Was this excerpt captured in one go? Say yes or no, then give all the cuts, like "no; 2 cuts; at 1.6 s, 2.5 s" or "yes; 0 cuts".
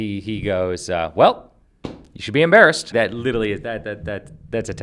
no; 1 cut; at 2.9 s